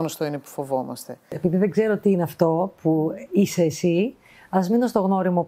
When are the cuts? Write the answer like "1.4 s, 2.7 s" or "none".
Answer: 1.3 s